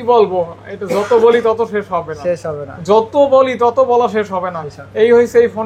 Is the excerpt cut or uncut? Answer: uncut